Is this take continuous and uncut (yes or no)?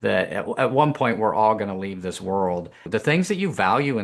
no